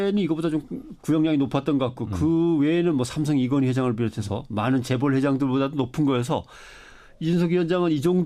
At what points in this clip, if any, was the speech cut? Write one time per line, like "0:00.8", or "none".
0:02.5